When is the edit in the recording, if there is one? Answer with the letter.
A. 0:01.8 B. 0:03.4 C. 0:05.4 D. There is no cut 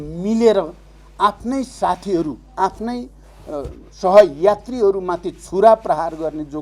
D